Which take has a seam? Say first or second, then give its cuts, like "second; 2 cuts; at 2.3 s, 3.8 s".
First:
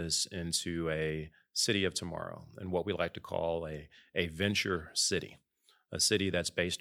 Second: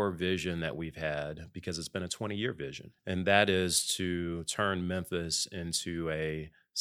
second; 1 cut; at 2.9 s